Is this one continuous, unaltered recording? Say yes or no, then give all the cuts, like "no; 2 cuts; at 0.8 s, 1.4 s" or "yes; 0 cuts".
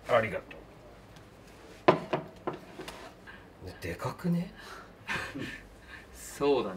yes; 0 cuts